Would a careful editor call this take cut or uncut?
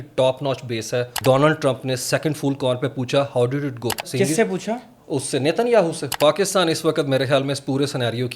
cut